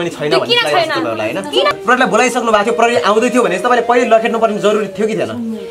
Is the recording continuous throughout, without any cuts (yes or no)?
no